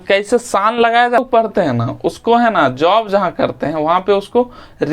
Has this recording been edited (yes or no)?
yes